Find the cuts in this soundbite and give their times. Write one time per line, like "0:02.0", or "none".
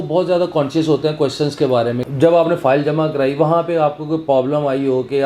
0:02.0

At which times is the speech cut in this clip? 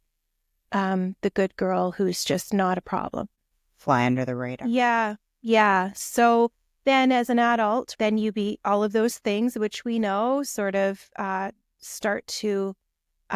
0:03.4
0:07.9

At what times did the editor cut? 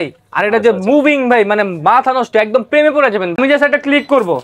0:03.4

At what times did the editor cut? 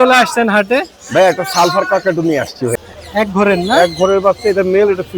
0:02.7

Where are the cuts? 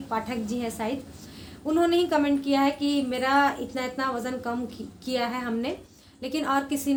none

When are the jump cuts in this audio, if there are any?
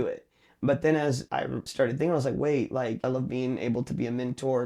0:01.4
0:03.0

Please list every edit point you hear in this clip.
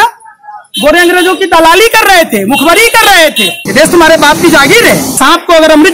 0:03.1
0:05.1

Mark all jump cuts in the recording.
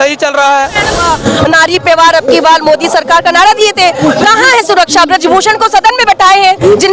0:01.0

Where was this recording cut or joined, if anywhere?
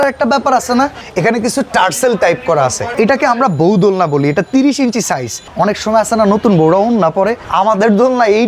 0:01.0
0:02.8
0:05.4
0:07.4

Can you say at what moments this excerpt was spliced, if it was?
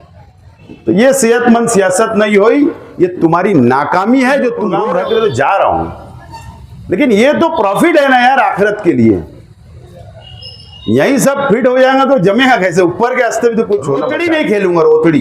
0:04.7
0:14.1

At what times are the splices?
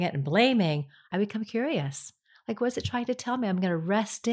0:01.1

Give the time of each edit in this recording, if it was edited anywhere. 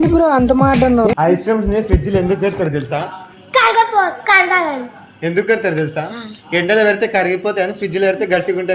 0:01.2

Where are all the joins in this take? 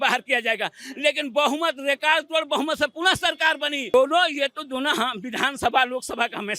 0:03.9

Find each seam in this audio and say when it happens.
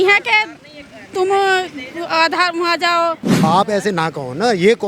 0:03.4

